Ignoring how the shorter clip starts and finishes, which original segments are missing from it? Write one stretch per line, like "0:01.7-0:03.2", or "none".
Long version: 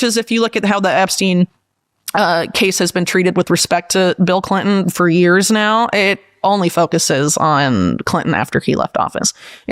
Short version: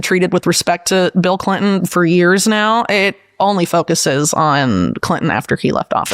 none

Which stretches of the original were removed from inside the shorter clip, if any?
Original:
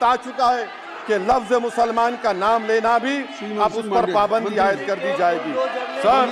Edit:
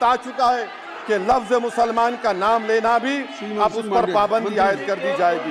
none

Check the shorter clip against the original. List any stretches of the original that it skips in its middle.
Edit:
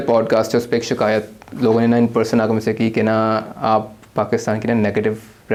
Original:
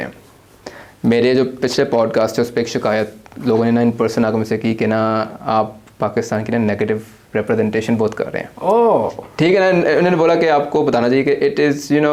none

